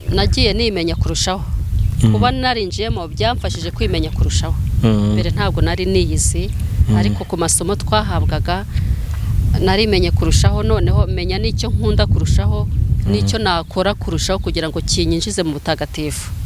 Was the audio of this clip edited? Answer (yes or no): no